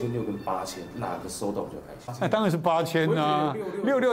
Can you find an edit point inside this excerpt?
yes; 1 cut; at 2.0 s

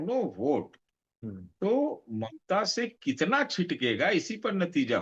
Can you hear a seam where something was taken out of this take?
no; 0 cuts

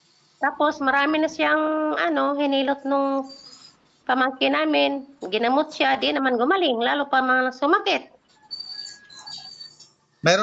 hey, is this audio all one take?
yes; 0 cuts

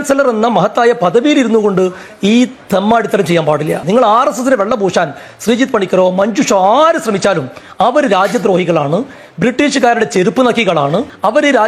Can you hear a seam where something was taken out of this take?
no; 0 cuts

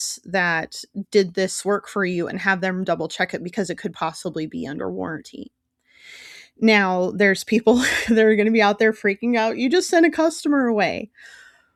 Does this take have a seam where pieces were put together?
no; 0 cuts

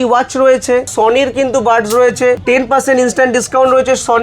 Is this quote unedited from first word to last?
no; 2 cuts; at 0.9 s, 2.4 s

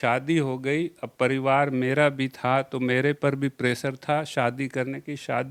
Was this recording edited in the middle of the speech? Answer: no; 0 cuts

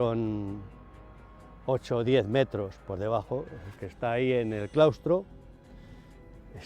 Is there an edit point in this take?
no; 0 cuts

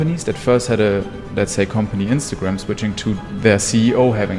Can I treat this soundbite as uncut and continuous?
yes; 0 cuts

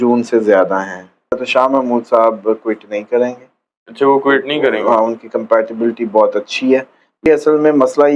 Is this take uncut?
no; 2 cuts; at 1.4 s, 7.3 s

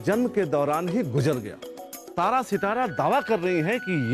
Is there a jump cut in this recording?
yes; 1 cut; at 2.1 s

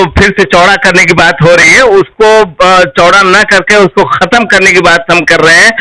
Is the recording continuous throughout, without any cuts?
yes; 0 cuts

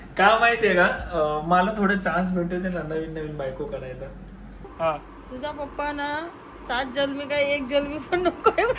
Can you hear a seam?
yes; 1 cut; at 4.4 s

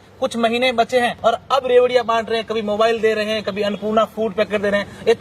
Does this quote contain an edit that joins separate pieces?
yes; 1 cut; at 1.1 s

